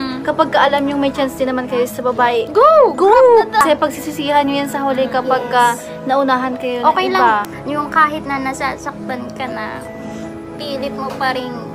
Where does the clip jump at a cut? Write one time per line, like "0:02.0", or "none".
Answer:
0:03.6
0:07.5